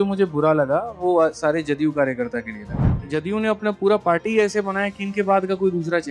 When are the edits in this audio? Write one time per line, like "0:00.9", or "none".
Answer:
0:03.0